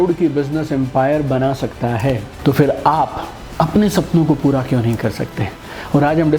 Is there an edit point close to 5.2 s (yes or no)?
no